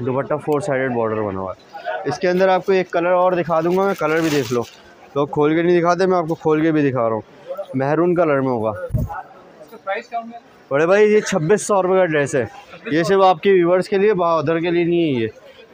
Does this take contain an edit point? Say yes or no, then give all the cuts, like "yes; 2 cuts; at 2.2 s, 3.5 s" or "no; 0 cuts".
no; 0 cuts